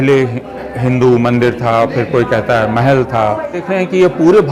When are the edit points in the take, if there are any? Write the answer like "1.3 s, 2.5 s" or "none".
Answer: 3.6 s